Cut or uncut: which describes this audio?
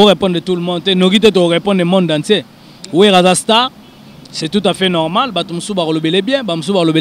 uncut